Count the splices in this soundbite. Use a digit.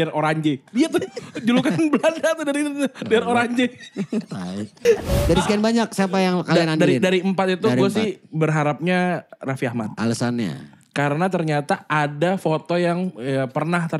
1